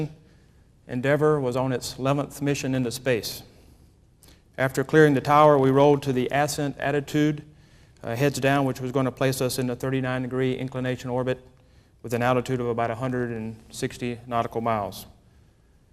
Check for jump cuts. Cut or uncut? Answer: cut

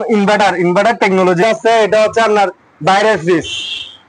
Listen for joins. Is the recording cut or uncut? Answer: cut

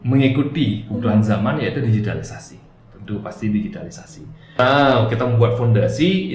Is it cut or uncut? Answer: cut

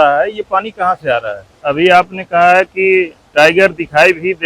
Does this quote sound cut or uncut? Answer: cut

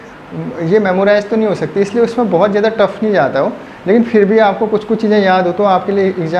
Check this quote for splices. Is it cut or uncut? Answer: uncut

